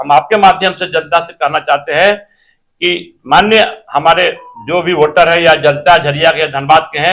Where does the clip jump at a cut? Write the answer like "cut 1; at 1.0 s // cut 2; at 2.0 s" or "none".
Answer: none